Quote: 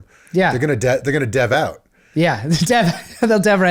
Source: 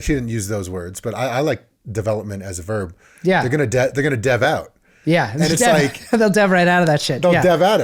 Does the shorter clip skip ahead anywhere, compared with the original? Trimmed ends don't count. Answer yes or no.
no